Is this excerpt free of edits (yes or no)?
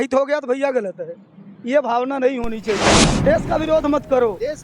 no